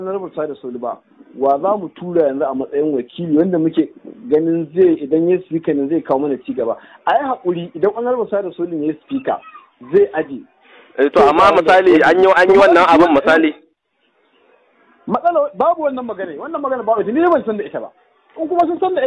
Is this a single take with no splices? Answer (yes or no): yes